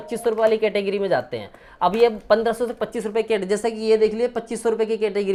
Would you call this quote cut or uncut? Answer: uncut